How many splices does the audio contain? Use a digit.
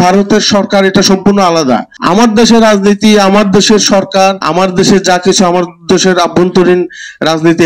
2